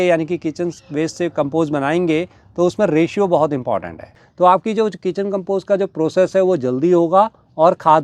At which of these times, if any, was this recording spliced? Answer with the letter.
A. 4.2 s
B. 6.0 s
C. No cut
A